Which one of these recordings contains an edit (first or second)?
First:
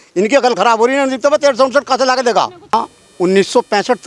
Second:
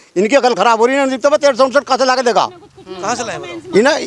first